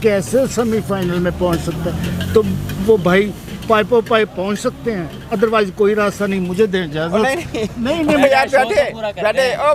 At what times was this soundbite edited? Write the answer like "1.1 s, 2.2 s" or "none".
none